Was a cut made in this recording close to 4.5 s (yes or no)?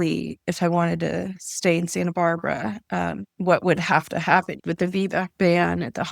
yes